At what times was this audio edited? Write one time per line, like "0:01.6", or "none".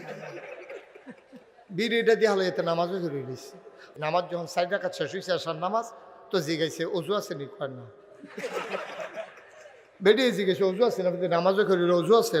0:03.9